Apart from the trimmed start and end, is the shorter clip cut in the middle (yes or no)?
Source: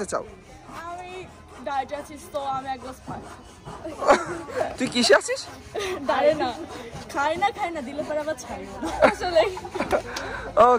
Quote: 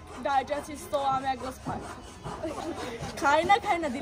yes